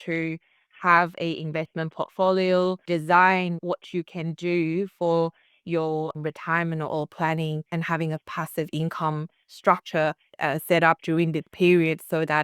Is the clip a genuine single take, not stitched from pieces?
no; 2 cuts; at 2.8 s, 6.1 s

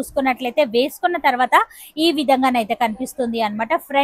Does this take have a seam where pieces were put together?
no; 0 cuts

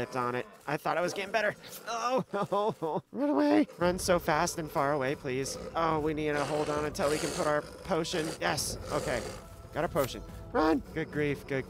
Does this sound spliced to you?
no; 0 cuts

